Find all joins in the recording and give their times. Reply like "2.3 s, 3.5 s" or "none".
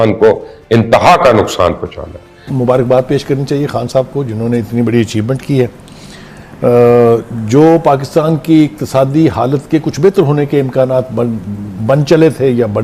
2.5 s